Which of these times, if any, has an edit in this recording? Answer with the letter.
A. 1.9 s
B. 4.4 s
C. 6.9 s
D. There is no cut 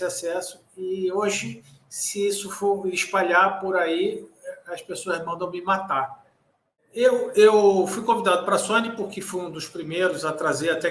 C